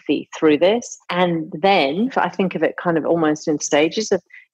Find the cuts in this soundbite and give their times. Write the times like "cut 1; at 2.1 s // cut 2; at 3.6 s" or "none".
cut 1; at 1.2 s // cut 2; at 2.1 s // cut 3; at 3.6 s